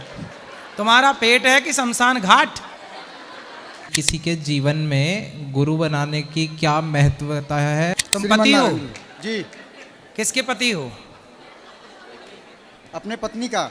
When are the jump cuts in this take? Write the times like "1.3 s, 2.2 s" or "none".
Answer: 3.9 s, 8.0 s